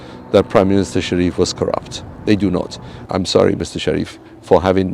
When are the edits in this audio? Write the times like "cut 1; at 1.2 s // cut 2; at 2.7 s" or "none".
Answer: cut 1; at 2.9 s